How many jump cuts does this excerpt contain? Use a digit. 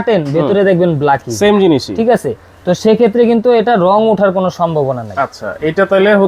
0